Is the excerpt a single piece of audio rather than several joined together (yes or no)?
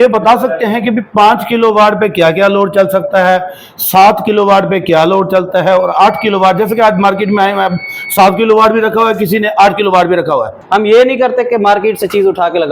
no